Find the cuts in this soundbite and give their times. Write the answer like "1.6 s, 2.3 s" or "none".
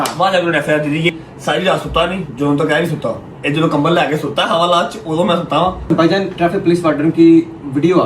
1.1 s, 5.9 s